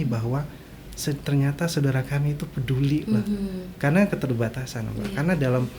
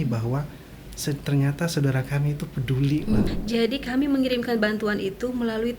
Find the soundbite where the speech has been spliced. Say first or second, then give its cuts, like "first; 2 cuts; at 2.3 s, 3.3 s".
second; 1 cut; at 3.3 s